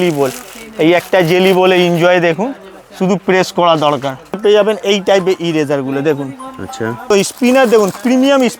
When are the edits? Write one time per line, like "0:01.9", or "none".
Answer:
0:04.4
0:07.1

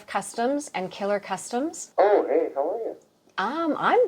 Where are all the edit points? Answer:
0:01.8

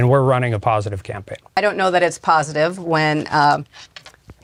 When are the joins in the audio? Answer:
none

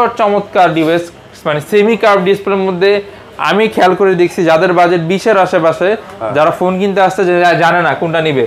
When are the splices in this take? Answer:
none

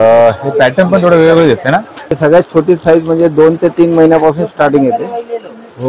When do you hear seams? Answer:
0:02.1

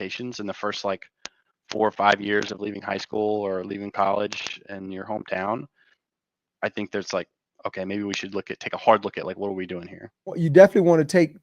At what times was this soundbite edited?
0:10.4

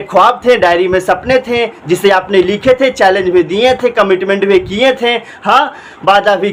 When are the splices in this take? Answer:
none

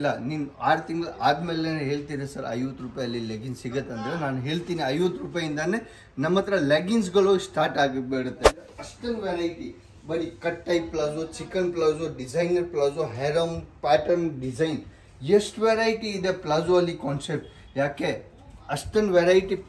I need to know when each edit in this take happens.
0:08.7

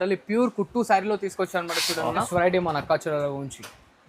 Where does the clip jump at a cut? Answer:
0:02.3

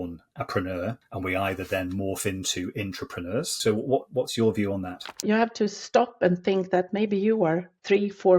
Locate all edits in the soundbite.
0:01.1
0:03.5
0:05.2

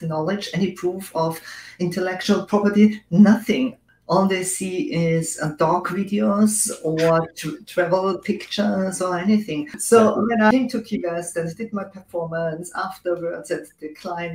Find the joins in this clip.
0:09.7
0:10.5

